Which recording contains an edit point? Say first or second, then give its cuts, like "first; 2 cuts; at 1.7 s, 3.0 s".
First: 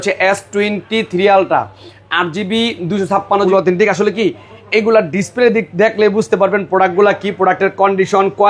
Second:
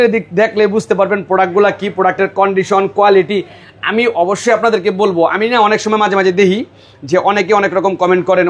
first; 1 cut; at 3.5 s